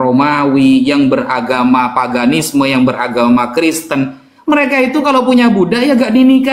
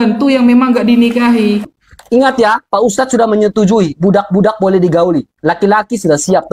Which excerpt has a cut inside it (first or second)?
second